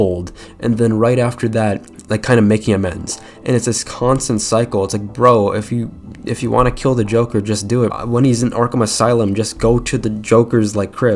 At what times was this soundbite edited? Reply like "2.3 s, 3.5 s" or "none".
7.9 s